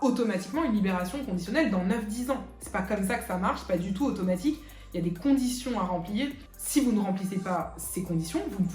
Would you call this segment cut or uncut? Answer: uncut